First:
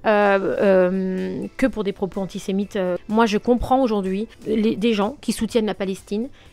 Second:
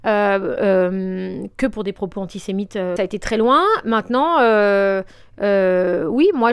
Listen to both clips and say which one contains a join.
first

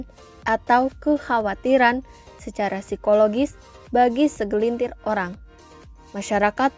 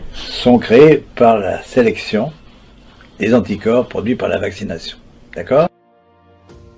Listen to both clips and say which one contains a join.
second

